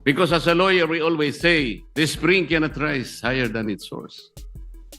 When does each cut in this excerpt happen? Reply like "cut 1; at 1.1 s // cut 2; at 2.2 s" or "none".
cut 1; at 1.8 s